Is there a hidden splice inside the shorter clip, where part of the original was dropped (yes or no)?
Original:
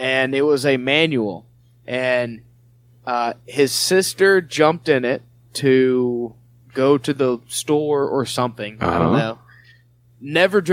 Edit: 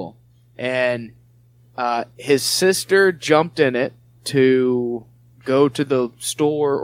no